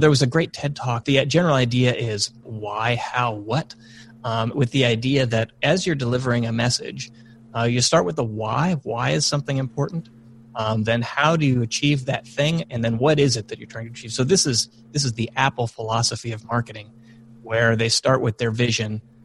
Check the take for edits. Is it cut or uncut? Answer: cut